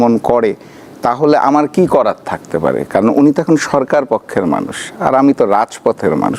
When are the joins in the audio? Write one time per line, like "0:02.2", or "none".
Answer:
none